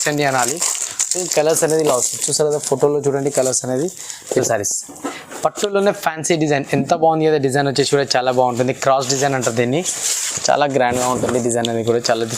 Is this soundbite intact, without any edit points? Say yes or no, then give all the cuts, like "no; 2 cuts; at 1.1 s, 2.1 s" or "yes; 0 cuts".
no; 1 cut; at 4.4 s